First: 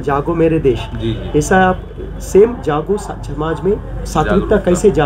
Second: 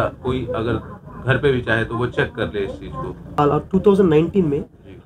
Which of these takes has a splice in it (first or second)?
second